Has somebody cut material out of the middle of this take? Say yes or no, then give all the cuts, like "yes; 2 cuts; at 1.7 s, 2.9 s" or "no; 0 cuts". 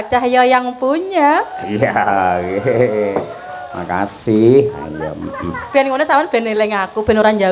no; 0 cuts